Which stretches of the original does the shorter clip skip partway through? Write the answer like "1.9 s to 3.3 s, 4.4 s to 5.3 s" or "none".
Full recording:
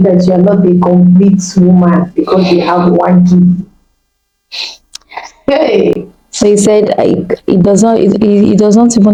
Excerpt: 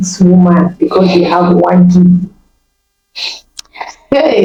none